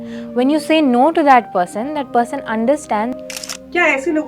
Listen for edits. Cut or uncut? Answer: cut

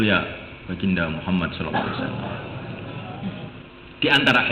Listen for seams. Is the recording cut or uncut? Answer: uncut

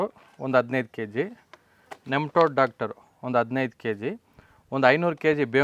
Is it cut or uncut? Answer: uncut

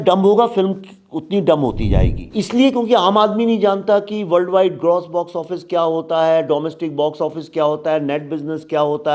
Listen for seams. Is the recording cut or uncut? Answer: cut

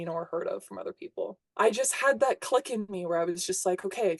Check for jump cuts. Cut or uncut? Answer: cut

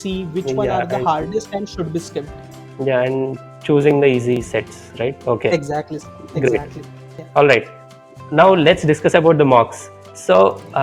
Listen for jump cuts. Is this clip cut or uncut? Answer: uncut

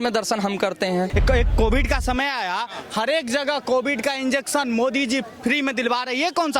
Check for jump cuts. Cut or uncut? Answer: cut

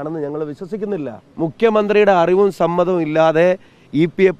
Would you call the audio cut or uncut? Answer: cut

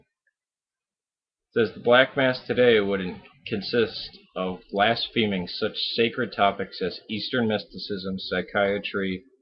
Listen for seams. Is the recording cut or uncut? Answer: cut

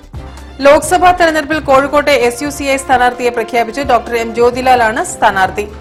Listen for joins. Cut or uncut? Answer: uncut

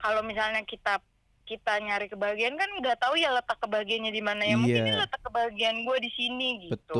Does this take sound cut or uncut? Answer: uncut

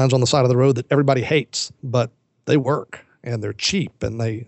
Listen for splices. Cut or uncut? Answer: cut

